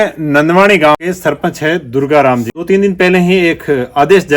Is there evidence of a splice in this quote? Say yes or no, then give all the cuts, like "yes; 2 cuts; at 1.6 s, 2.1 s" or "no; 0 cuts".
yes; 2 cuts; at 0.9 s, 2.5 s